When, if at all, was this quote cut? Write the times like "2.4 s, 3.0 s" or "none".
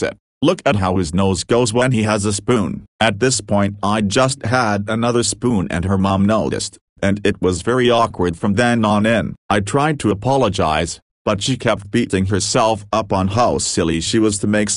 2.8 s

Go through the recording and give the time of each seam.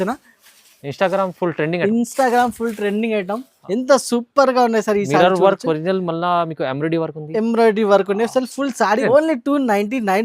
3.5 s, 9.0 s

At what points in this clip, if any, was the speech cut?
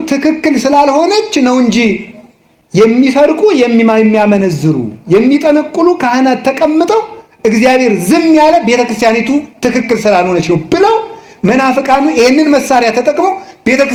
none

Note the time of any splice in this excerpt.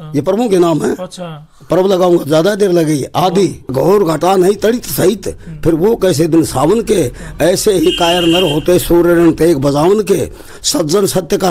3.7 s

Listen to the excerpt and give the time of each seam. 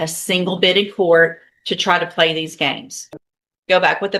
2.9 s

